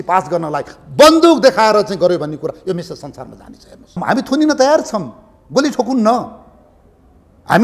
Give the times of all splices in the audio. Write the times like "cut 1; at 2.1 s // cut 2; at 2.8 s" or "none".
cut 1; at 4.0 s